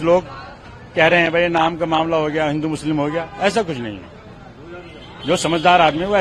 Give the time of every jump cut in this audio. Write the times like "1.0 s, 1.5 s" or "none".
none